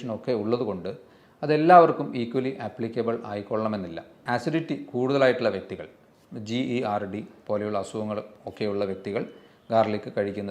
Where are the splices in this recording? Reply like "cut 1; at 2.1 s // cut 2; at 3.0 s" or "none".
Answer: cut 1; at 4.3 s